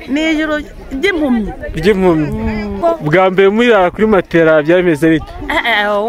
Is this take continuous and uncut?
no; 1 cut; at 2.8 s

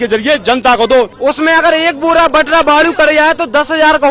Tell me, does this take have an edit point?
yes; 1 cut; at 1.1 s

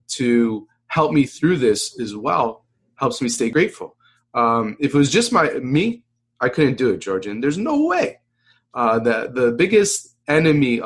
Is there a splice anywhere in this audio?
yes; 1 cut; at 3.5 s

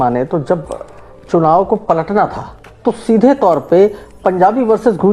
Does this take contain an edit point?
no; 0 cuts

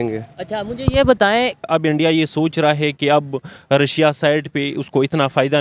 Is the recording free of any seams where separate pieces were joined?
no; 1 cut; at 1.6 s

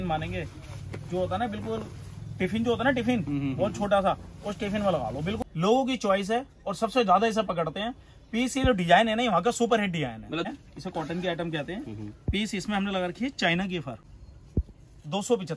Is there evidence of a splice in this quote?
yes; 3 cuts; at 5.4 s, 10.5 s, 14.0 s

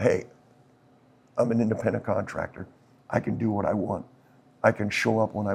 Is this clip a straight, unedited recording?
yes; 0 cuts

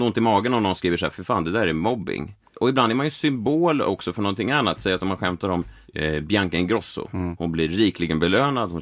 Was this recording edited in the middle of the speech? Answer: yes; 4 cuts; at 1.2 s, 2.4 s, 5.8 s, 7.3 s

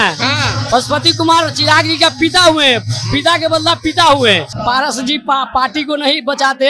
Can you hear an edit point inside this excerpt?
yes; 1 cut; at 4.5 s

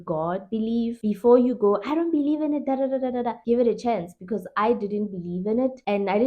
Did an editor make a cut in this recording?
no; 0 cuts

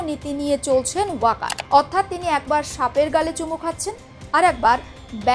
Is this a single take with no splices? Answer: no; 1 cut; at 1.5 s

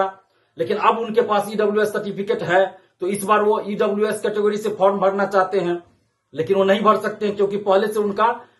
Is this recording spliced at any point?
no; 0 cuts

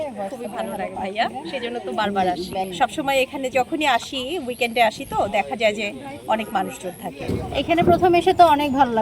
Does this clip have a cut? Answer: yes; 2 cuts; at 2.7 s, 7.3 s

